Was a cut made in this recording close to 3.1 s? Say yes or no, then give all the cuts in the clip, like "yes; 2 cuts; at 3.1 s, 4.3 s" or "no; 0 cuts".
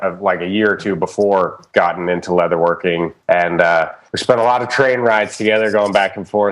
yes; 2 cuts; at 3.1 s, 4.0 s